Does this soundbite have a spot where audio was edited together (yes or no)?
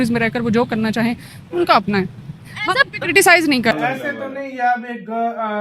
yes